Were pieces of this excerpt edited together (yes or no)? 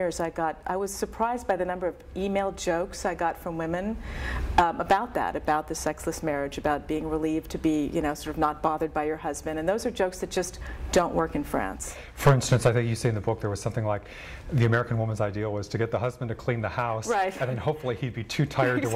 no